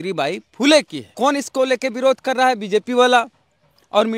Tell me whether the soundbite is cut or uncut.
cut